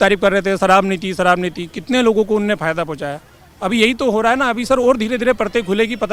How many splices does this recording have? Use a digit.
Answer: 0